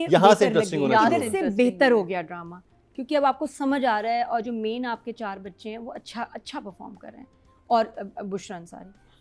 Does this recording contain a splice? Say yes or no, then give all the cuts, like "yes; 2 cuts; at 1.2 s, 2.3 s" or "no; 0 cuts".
no; 0 cuts